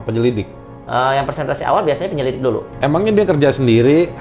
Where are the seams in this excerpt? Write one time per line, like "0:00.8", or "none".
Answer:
0:02.7